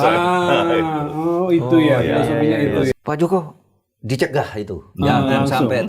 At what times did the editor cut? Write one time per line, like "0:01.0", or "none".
0:02.9